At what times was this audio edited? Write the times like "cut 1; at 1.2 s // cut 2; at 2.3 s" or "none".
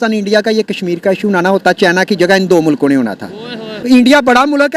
cut 1; at 3.7 s

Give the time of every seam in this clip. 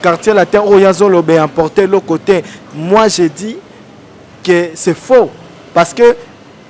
none

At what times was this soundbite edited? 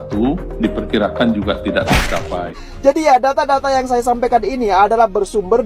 cut 1; at 2.6 s

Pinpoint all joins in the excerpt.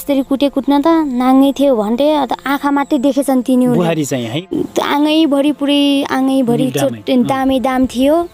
cut 1; at 4.5 s

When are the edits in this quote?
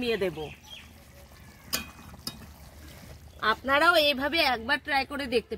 cut 1; at 3.1 s

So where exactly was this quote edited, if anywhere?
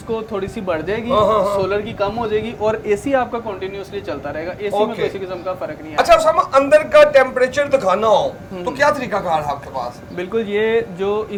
none

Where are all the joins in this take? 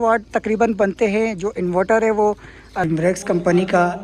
cut 1; at 2.8 s

